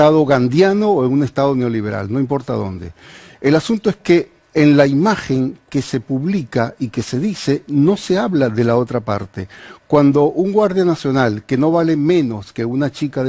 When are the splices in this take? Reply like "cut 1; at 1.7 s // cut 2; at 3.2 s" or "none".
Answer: cut 1; at 7.1 s